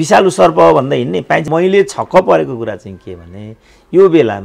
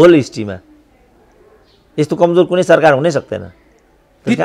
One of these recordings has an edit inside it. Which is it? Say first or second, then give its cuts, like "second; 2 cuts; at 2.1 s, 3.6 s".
first; 1 cut; at 1.5 s